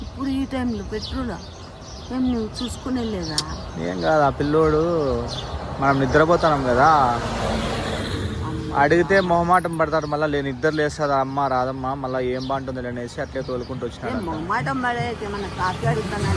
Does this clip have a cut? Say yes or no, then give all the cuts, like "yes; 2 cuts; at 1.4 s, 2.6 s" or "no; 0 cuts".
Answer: no; 0 cuts